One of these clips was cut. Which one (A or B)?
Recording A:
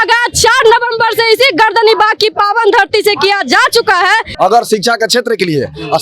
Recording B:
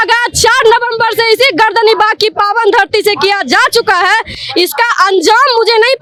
A